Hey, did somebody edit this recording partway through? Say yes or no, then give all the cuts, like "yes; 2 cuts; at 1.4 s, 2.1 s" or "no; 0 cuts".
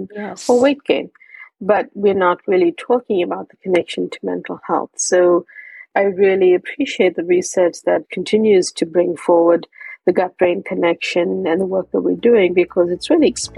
yes; 2 cuts; at 5.9 s, 8.1 s